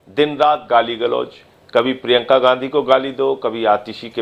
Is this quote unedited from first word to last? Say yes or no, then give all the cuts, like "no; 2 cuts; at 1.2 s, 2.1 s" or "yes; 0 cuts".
yes; 0 cuts